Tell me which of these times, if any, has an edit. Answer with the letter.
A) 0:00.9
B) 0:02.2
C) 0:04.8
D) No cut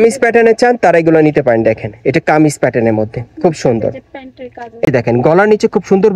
C